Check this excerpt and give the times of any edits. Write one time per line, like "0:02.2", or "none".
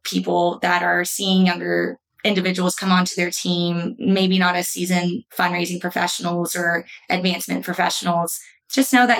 0:05.3